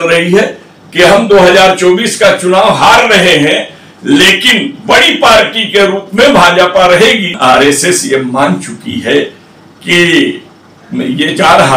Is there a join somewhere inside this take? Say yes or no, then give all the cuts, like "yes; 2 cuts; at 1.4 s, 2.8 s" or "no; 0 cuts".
yes; 1 cut; at 7.3 s